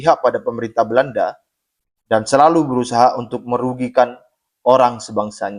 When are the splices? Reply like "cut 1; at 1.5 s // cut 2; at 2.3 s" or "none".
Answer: none